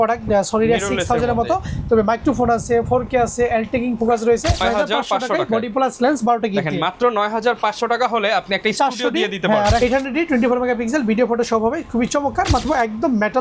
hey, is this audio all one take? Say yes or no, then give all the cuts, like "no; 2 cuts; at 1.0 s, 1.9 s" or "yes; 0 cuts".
no; 3 cuts; at 4.6 s, 9.8 s, 12.6 s